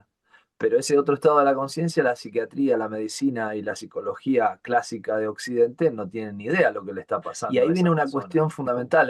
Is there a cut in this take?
yes; 1 cut; at 7.4 s

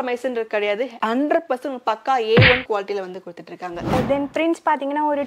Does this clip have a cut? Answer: yes; 1 cut; at 3.9 s

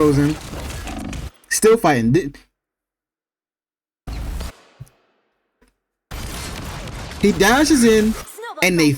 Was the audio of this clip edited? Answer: no; 0 cuts

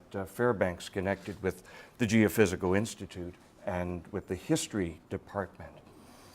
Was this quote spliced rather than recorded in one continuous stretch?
yes; 1 cut; at 2.2 s

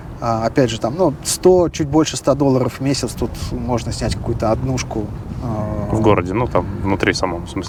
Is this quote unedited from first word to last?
yes; 0 cuts

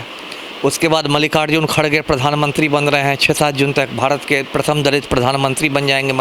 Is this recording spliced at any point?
no; 0 cuts

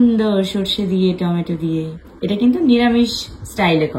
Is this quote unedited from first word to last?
no; 1 cut; at 2.0 s

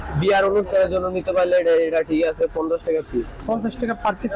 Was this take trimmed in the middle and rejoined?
no; 0 cuts

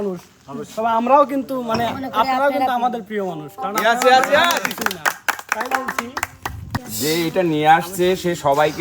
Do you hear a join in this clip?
yes; 1 cut; at 6.8 s

